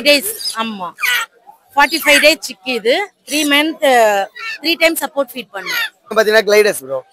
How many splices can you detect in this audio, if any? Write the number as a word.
one